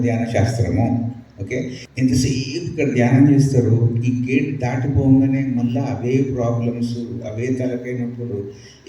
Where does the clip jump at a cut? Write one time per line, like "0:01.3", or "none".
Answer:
0:01.8